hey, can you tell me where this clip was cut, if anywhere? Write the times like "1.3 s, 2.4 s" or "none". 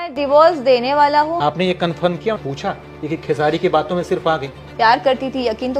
none